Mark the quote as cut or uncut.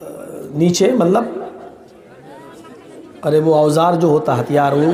uncut